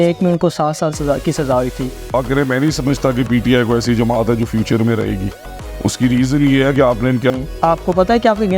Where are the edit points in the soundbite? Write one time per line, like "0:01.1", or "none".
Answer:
0:02.1
0:07.3